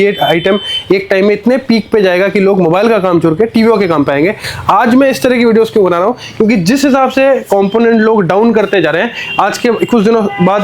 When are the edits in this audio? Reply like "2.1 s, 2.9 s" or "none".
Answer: none